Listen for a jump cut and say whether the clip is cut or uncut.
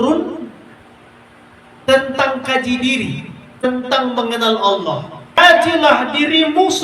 cut